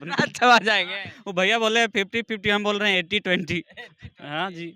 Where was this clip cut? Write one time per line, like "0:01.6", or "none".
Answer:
none